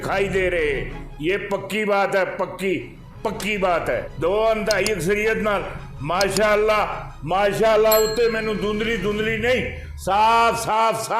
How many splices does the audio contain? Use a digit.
1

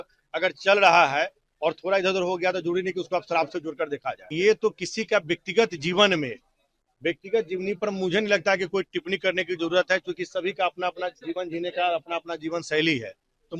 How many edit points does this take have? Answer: 1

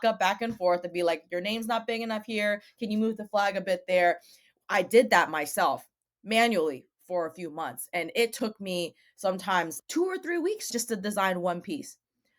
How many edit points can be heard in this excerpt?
1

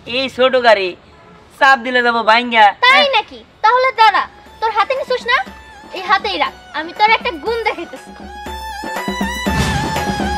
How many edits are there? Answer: 0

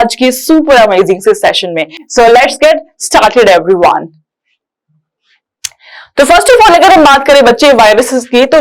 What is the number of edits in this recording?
0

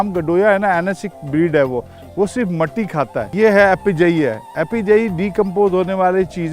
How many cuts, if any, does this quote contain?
1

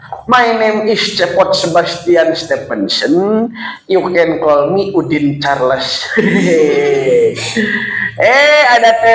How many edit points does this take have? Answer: 0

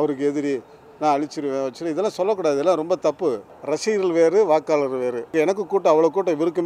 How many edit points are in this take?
2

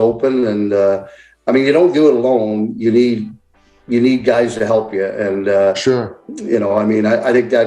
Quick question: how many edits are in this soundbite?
0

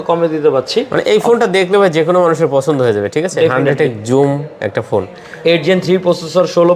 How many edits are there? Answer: 0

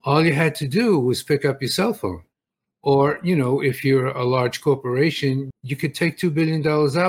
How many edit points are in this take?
1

